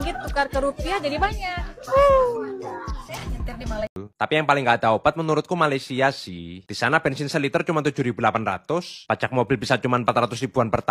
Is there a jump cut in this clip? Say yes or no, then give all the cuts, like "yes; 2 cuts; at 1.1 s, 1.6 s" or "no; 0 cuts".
yes; 1 cut; at 4.0 s